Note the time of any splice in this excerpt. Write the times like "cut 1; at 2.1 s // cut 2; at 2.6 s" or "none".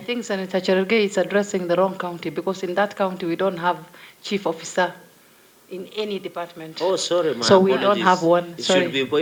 none